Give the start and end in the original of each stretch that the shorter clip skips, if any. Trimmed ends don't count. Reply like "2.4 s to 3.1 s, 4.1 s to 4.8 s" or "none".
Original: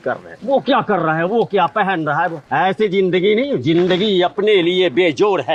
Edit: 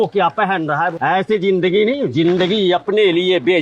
2.3 s to 2.5 s